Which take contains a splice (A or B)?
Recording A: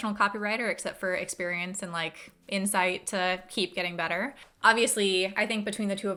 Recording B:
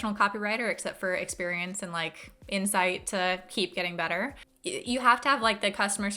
B